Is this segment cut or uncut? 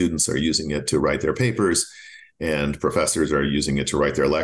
uncut